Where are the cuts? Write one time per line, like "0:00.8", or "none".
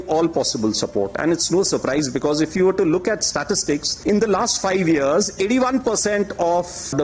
none